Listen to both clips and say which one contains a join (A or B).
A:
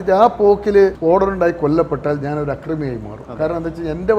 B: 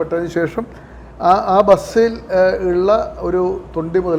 A